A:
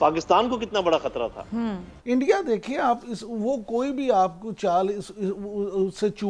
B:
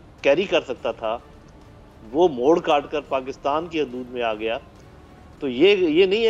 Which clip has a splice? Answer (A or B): A